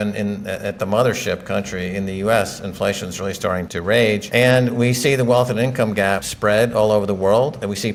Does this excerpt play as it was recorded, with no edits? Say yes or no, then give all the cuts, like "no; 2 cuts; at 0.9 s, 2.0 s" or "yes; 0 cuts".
yes; 0 cuts